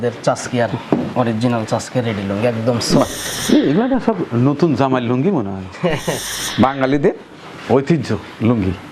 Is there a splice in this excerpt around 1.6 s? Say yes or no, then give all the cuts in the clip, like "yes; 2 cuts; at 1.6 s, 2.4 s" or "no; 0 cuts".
no; 2 cuts; at 3.3 s, 6.4 s